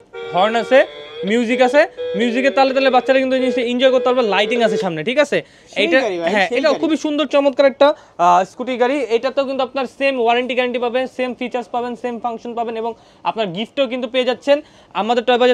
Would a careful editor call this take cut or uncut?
uncut